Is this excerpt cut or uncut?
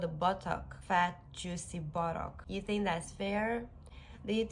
cut